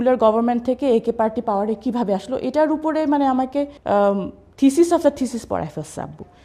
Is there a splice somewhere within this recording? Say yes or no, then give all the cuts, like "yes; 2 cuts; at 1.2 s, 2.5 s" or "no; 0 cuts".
yes; 1 cut; at 3.8 s